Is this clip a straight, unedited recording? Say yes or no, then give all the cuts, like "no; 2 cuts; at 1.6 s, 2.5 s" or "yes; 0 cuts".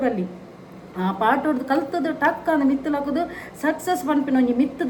yes; 0 cuts